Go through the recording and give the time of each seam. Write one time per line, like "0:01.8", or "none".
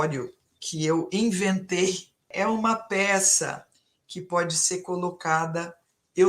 0:02.3